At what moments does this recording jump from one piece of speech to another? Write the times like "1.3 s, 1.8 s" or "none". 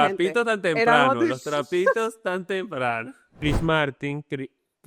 3.4 s